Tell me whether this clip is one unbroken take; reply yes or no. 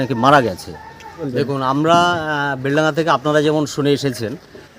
no